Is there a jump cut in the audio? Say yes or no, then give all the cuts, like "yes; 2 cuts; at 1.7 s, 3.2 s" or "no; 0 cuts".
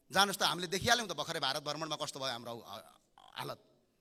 no; 0 cuts